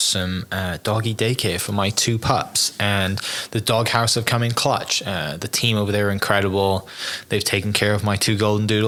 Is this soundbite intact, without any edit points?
yes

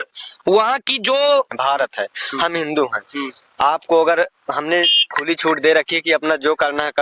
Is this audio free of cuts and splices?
no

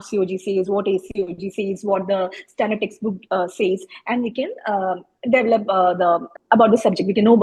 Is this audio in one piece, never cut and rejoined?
yes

